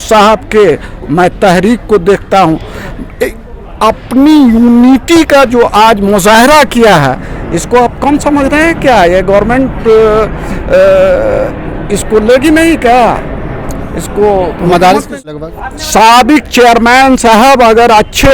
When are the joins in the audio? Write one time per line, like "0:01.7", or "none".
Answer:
0:15.3